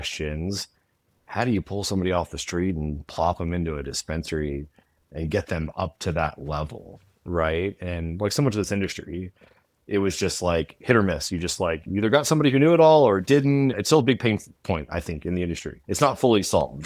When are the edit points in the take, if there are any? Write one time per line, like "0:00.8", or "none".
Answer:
0:13.8
0:15.7